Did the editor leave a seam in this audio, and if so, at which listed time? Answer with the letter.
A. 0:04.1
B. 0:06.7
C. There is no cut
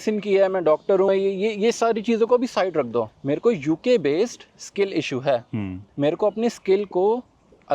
C